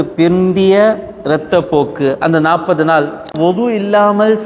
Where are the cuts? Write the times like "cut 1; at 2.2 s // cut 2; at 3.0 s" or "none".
cut 1; at 3.2 s